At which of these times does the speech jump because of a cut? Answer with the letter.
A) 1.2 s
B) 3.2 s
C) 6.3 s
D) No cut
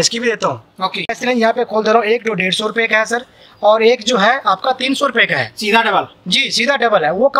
A